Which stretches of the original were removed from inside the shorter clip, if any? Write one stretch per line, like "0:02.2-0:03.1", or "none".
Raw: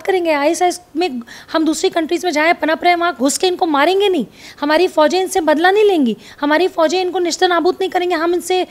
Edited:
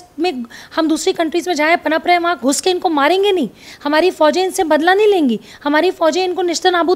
none